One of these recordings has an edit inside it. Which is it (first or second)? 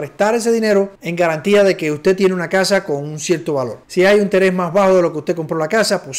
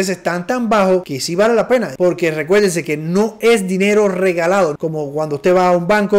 second